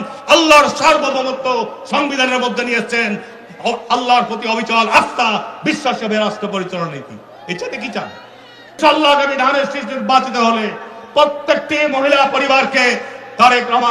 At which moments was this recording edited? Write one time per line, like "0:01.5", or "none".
0:08.8